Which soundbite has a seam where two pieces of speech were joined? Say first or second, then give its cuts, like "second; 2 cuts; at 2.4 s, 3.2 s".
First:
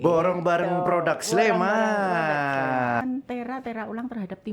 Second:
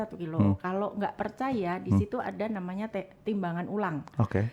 first; 1 cut; at 3.0 s